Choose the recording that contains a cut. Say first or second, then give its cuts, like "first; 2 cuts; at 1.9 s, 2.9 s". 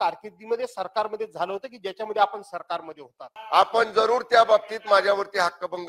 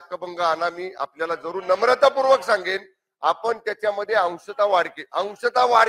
first; 1 cut; at 3.3 s